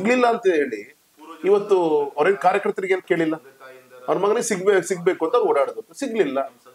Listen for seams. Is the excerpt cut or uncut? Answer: uncut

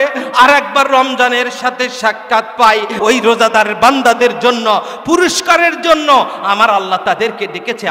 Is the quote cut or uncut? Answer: cut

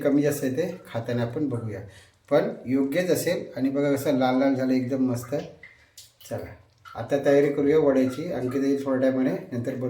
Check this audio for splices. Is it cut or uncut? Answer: uncut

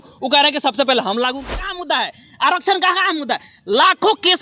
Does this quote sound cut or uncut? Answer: cut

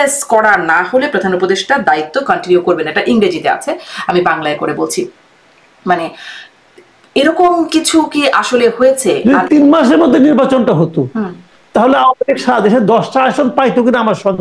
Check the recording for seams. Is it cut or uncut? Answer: cut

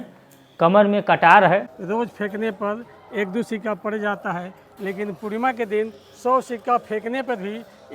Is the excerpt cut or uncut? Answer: cut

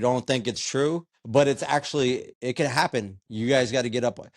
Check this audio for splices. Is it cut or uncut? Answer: cut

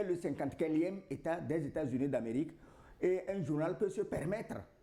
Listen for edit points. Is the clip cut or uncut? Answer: uncut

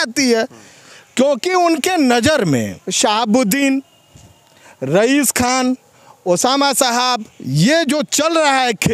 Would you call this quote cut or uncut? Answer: cut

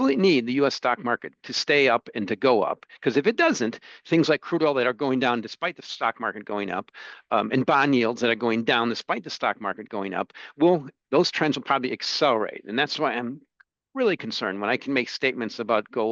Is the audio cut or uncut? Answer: uncut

